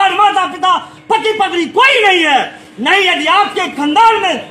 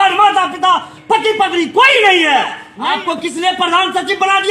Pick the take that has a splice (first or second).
second